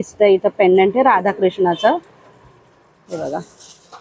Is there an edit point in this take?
no; 0 cuts

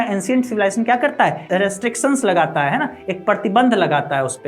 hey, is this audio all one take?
no; 1 cut; at 1.5 s

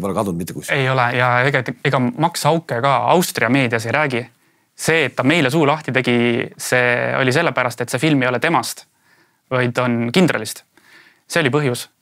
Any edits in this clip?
no; 0 cuts

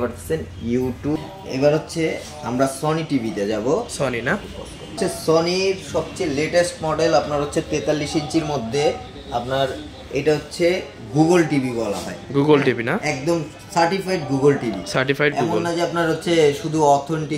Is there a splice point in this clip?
yes; 2 cuts; at 1.2 s, 5.0 s

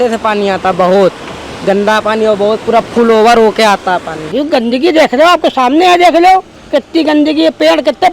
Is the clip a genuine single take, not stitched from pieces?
no; 2 cuts; at 4.2 s, 6.6 s

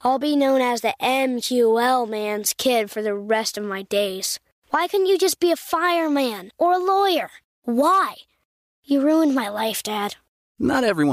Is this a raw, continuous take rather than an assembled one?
yes; 0 cuts

